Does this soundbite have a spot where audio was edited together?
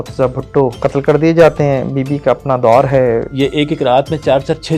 yes; 2 cuts; at 0.8 s, 3.3 s

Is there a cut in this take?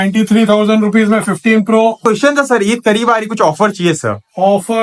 yes; 1 cut; at 2.0 s

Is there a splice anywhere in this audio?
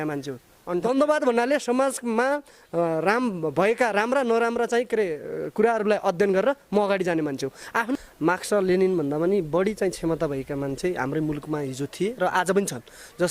yes; 2 cuts; at 0.8 s, 7.9 s

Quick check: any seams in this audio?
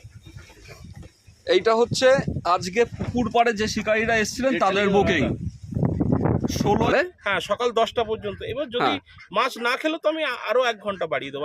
yes; 1 cut; at 6.9 s

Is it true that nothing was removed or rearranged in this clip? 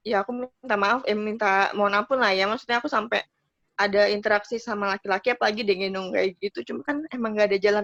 yes; 0 cuts

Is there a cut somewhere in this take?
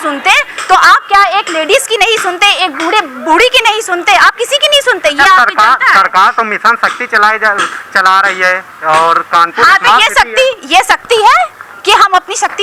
no; 0 cuts

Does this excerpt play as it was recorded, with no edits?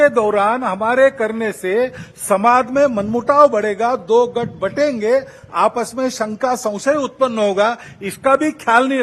yes; 0 cuts

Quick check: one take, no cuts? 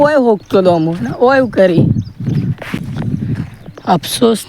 no; 1 cut; at 2.7 s

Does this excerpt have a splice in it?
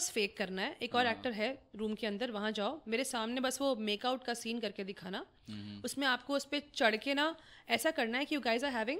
no; 0 cuts

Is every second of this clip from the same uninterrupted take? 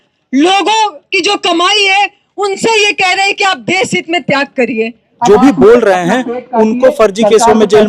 no; 1 cut; at 5.1 s

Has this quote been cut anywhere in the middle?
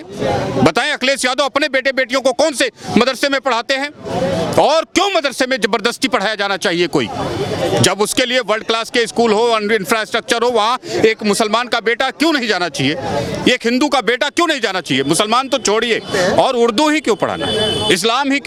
no; 0 cuts

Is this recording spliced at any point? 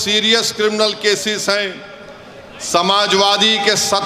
no; 0 cuts

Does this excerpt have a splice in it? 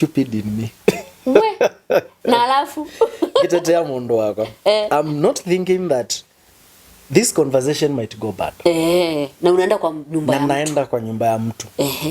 no; 0 cuts

